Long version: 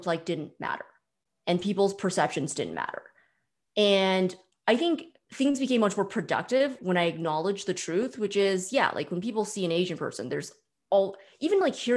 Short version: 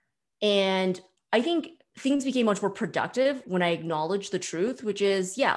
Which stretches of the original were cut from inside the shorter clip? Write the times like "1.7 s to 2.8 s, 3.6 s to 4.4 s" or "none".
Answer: none